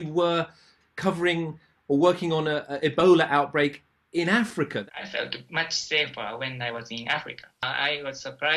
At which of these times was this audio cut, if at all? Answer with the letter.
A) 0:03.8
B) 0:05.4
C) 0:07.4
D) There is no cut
C